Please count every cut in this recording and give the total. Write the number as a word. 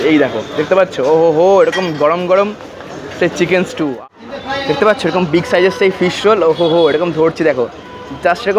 one